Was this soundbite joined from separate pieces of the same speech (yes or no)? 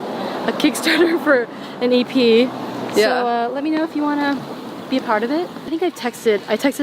yes